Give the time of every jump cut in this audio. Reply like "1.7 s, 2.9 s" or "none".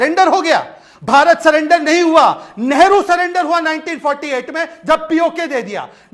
none